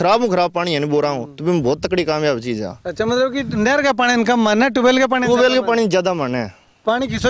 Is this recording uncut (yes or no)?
yes